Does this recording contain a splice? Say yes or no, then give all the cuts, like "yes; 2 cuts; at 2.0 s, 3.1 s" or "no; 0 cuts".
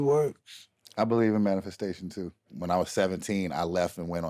yes; 1 cut; at 2.5 s